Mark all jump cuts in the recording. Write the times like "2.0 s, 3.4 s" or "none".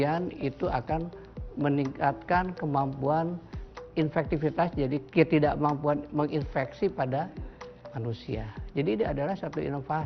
3.9 s, 5.1 s